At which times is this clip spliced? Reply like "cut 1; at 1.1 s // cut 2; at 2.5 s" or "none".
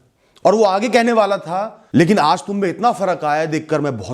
cut 1; at 1.8 s